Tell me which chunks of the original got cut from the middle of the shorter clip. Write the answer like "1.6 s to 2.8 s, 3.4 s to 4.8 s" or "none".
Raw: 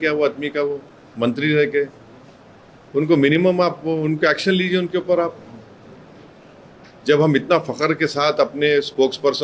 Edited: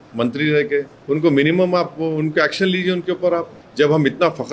2.0 s to 2.8 s, 5.4 s to 6.9 s